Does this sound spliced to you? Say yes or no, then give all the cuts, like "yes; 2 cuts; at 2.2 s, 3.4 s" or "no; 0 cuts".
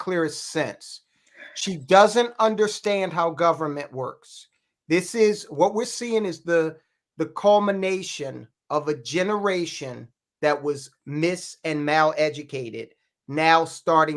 no; 0 cuts